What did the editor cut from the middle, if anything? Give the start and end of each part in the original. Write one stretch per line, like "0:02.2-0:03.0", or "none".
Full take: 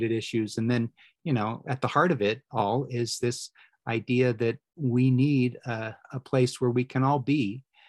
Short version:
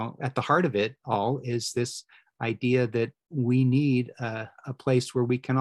none